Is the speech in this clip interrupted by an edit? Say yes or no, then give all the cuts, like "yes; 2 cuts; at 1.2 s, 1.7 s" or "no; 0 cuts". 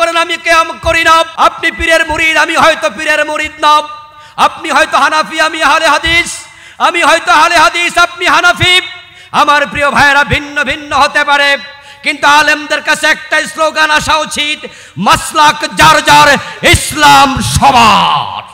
yes; 1 cut; at 1.3 s